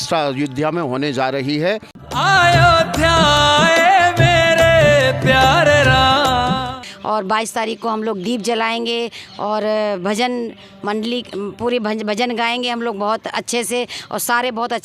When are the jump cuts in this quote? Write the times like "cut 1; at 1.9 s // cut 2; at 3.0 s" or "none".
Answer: cut 1; at 2.0 s // cut 2; at 6.9 s

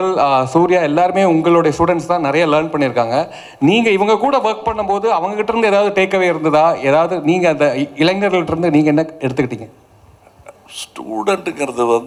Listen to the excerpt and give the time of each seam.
none

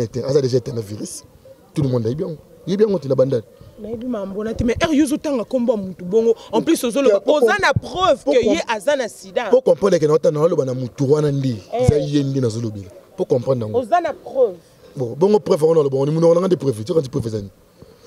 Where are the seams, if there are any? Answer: none

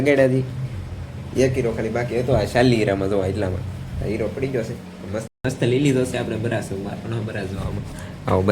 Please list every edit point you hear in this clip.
cut 1; at 5.3 s

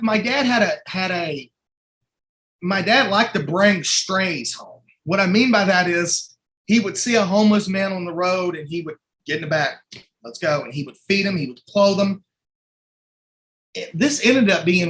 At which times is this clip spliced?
none

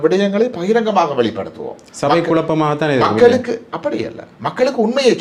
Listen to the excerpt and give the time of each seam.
none

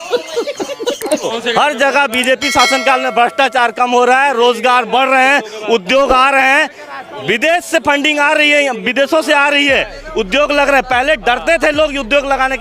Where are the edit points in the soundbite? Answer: cut 1; at 1.2 s

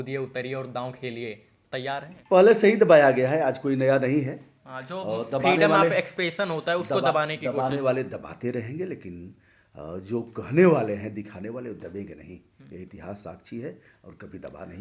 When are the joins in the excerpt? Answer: cut 1; at 2.1 s

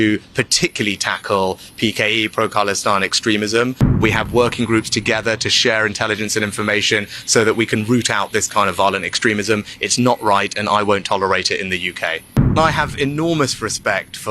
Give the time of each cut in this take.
cut 1; at 4.0 s // cut 2; at 12.5 s

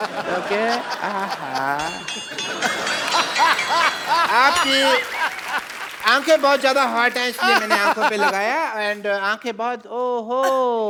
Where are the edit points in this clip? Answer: none

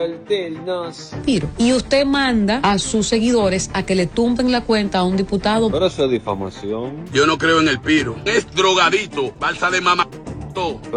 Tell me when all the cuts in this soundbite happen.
none

